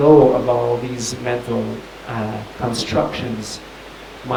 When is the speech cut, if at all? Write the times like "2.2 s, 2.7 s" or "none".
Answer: none